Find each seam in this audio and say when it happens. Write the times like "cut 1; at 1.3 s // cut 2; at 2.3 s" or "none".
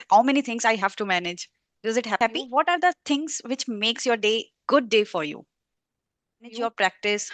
cut 1; at 2.4 s // cut 2; at 6.5 s

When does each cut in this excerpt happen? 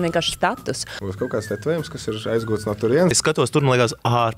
cut 1; at 0.9 s // cut 2; at 3.2 s

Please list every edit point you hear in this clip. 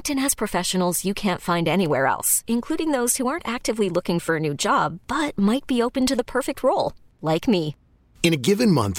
none

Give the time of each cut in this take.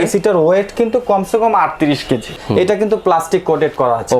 cut 1; at 2.4 s

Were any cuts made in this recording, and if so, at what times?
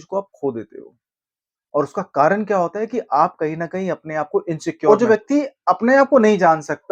cut 1; at 4.9 s

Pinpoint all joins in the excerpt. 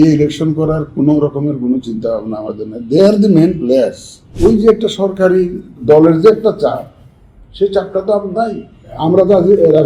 cut 1; at 4.2 s // cut 2; at 5.8 s // cut 3; at 8.9 s

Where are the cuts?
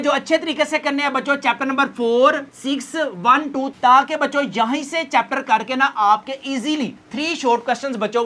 cut 1; at 3.7 s

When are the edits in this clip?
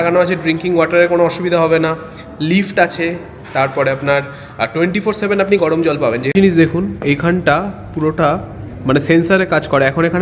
cut 1; at 6.3 s

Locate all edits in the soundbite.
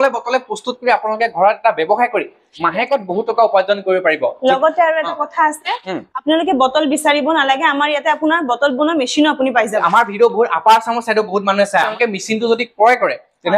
cut 1; at 9.7 s // cut 2; at 11.9 s

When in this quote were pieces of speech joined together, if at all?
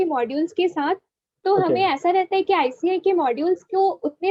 none

